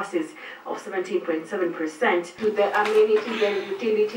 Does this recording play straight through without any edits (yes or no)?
no